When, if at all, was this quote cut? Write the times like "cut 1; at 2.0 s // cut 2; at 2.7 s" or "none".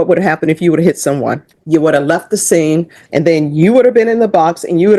cut 1; at 1.5 s // cut 2; at 3.0 s